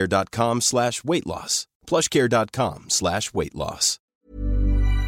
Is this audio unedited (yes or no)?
no